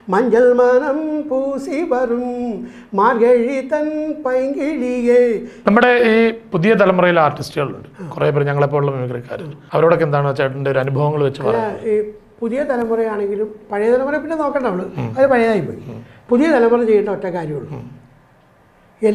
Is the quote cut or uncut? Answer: cut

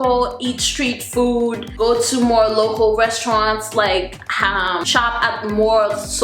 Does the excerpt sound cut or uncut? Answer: cut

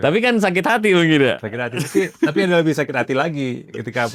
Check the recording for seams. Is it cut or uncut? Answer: uncut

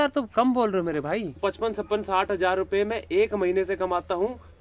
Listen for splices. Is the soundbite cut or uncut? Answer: cut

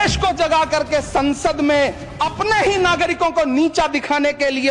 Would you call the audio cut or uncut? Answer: uncut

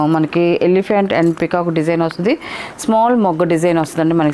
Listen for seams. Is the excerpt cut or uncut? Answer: uncut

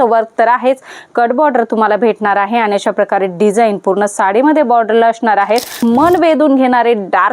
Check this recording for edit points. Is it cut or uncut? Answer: cut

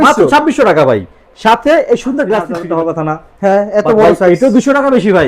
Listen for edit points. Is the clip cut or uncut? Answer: cut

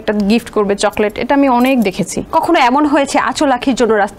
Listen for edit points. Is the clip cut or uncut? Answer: cut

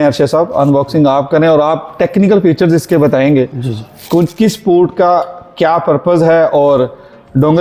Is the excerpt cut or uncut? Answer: uncut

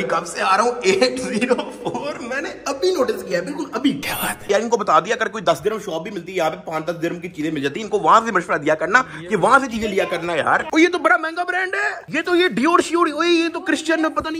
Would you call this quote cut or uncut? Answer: uncut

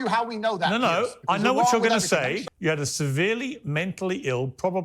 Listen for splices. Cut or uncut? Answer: cut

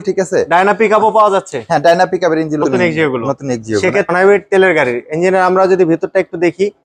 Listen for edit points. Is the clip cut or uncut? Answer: cut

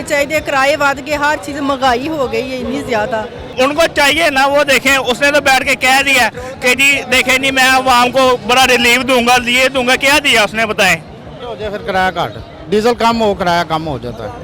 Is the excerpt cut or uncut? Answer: cut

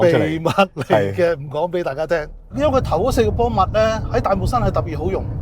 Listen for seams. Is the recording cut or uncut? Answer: cut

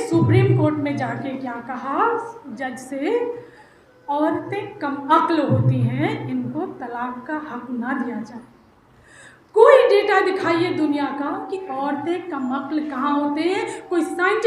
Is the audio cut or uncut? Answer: uncut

